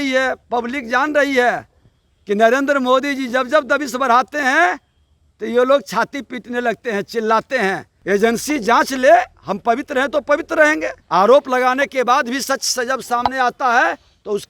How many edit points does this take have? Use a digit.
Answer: 2